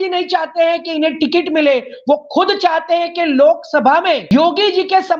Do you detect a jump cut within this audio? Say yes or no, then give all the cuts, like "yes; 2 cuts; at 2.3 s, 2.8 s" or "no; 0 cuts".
yes; 1 cut; at 4.2 s